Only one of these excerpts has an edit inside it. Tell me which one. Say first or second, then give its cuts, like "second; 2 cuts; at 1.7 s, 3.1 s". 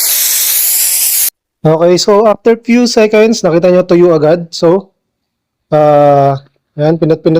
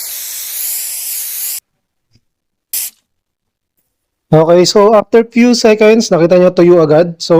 first; 1 cut; at 1.3 s